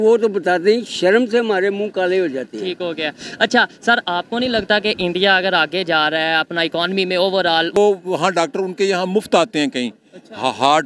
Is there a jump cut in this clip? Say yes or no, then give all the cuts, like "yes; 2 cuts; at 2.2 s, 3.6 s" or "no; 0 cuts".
yes; 1 cut; at 7.8 s